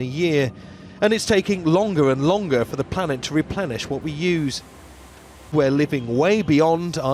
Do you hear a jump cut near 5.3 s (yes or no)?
yes